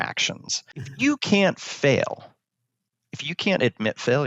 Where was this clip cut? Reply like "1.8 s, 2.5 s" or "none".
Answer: 0.9 s